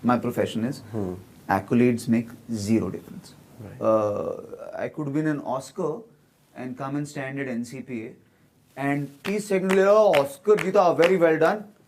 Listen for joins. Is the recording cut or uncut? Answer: uncut